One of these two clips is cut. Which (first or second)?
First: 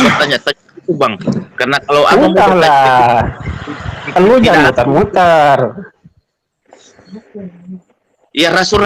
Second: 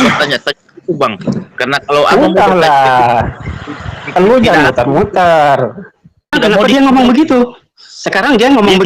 second